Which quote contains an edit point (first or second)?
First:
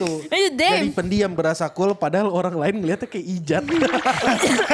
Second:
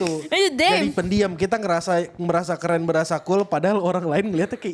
first